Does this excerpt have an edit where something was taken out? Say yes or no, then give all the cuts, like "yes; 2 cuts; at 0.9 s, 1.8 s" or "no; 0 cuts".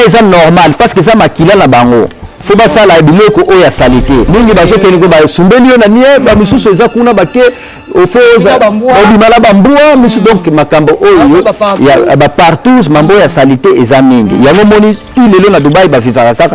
yes; 1 cut; at 4.3 s